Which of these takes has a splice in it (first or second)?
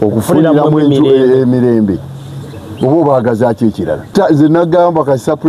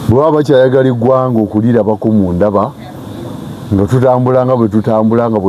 first